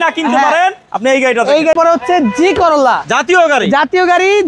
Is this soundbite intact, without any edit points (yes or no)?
no